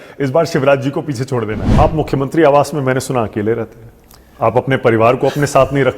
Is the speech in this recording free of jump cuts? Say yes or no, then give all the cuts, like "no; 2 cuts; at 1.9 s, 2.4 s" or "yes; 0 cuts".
no; 1 cut; at 1.6 s